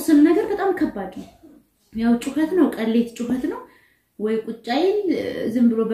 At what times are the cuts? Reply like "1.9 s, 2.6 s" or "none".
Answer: none